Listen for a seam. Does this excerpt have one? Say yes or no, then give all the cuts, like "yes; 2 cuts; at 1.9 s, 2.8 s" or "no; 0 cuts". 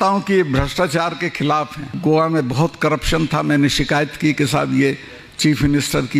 yes; 1 cut; at 1.9 s